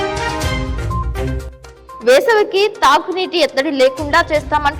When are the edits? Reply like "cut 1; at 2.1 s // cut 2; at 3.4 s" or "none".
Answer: cut 1; at 2.0 s